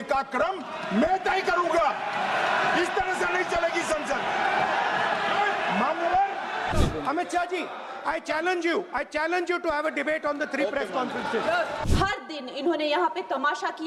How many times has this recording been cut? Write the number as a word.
two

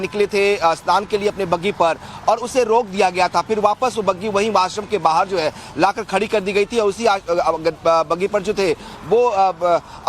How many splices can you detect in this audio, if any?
one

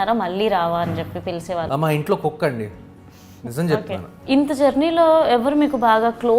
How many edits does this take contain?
two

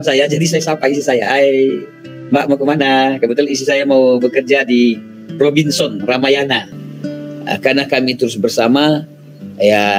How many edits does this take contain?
one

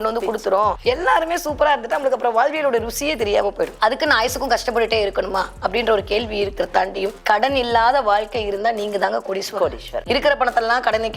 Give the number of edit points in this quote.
three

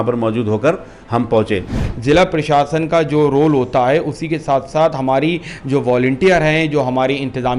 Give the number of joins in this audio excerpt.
one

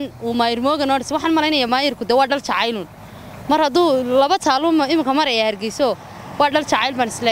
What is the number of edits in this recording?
zero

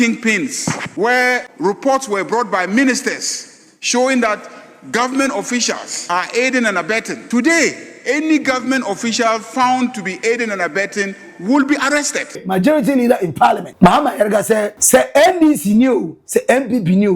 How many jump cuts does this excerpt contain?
seven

